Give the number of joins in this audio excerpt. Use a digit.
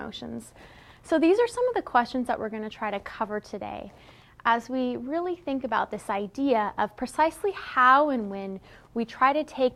0